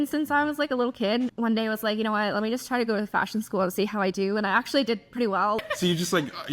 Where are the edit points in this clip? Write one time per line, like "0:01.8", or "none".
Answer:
0:01.3
0:05.6